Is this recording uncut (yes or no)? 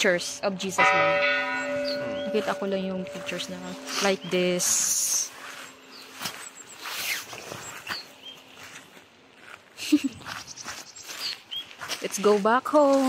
yes